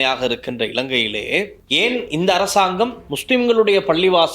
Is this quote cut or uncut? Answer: cut